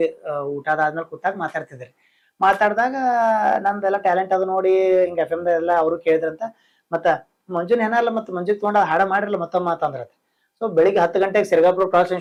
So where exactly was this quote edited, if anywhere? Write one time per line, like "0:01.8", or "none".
none